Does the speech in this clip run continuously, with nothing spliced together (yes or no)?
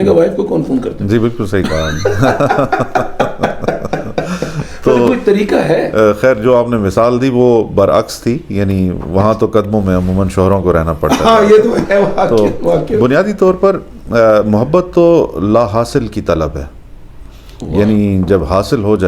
yes